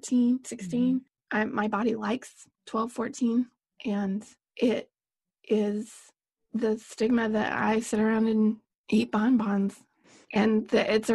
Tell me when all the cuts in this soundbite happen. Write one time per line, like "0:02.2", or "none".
0:01.2
0:04.4
0:08.7